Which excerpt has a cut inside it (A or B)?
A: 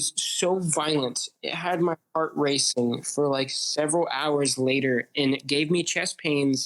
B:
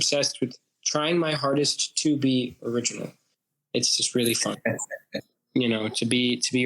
B